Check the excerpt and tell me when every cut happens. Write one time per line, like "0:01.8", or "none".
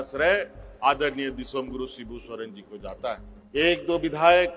0:03.3